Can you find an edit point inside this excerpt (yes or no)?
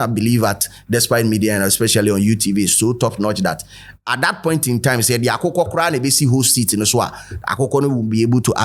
no